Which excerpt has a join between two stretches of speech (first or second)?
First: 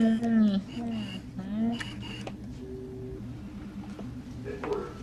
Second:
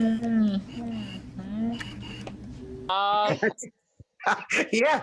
second